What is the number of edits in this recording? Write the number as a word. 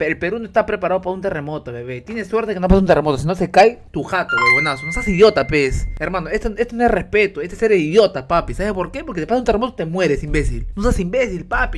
three